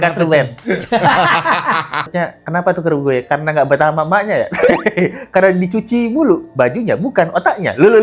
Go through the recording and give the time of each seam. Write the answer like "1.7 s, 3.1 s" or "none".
2.1 s